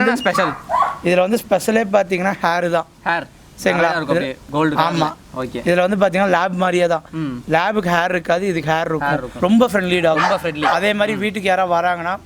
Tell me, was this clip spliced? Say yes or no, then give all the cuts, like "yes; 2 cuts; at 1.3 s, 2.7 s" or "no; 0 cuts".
yes; 1 cut; at 9.3 s